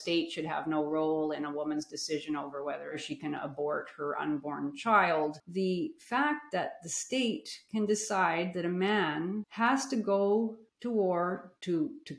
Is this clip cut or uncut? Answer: cut